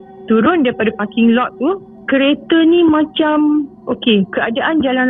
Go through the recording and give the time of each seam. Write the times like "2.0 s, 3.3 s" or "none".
1.9 s